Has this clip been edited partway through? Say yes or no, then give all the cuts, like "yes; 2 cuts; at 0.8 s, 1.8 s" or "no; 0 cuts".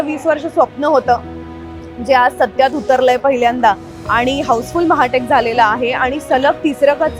no; 0 cuts